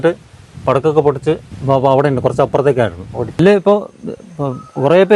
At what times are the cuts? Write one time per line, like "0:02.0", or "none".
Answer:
0:01.5
0:03.4